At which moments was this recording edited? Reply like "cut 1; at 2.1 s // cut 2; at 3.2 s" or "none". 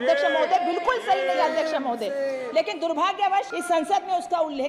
cut 1; at 3.6 s